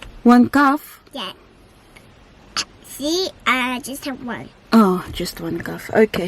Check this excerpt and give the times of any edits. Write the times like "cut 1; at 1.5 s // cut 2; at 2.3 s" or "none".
none